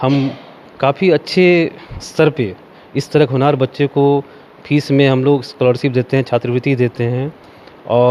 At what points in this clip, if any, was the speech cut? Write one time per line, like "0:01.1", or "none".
none